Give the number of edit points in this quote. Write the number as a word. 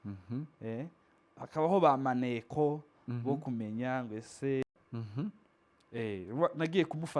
one